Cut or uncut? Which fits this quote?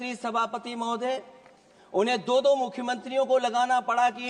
uncut